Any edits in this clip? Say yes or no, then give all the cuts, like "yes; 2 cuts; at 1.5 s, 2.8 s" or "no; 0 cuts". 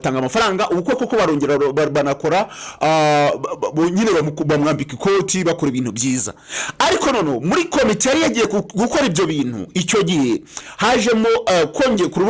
no; 0 cuts